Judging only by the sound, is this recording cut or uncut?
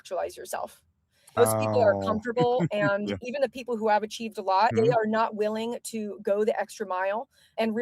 cut